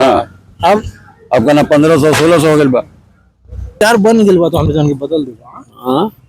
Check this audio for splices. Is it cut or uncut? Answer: cut